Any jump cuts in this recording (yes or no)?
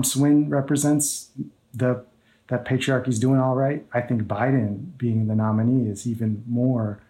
no